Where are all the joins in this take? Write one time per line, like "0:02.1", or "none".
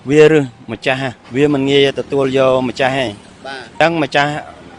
0:01.2
0:03.7